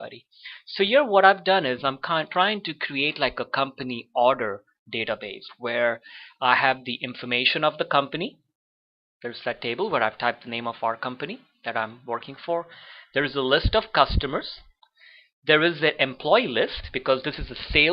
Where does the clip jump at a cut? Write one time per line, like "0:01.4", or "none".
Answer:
0:03.1